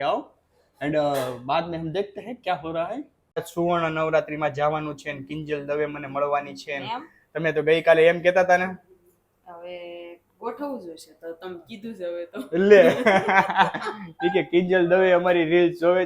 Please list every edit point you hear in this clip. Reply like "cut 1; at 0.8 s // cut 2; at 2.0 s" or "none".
cut 1; at 3.5 s